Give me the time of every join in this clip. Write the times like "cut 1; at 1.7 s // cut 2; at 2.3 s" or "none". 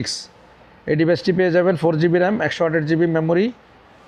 none